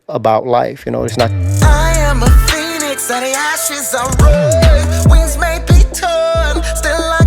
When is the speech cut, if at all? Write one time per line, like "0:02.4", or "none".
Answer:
0:01.4